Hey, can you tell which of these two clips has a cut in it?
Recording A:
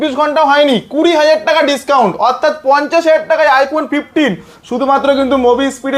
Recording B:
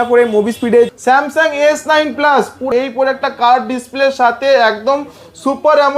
B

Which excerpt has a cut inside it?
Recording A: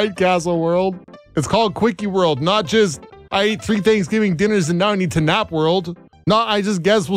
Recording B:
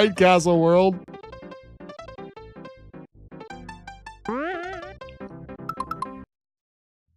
A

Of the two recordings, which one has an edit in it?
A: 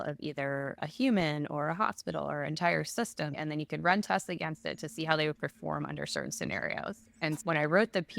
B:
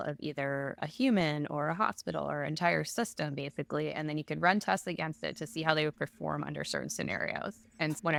A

